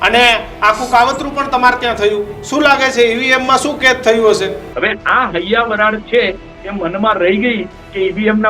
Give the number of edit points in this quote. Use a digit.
1